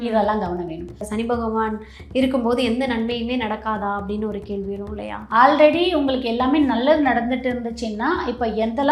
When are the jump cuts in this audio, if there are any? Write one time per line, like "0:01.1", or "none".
0:01.0
0:05.2

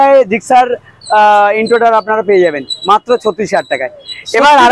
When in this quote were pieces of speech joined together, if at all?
none

